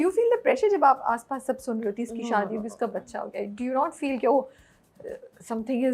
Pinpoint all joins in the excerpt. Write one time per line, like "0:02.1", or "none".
none